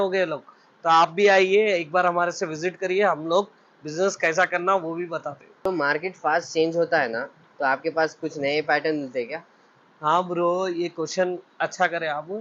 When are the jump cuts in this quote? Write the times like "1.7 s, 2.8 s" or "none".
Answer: none